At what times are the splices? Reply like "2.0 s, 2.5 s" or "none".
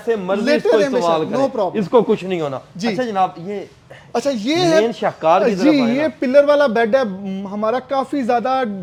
none